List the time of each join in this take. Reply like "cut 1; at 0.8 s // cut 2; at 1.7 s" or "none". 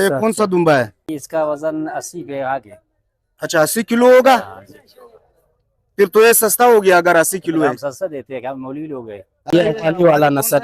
cut 1; at 1.1 s // cut 2; at 9.5 s